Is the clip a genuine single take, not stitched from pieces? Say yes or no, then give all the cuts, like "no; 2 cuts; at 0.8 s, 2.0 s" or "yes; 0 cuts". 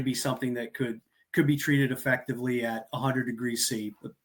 yes; 0 cuts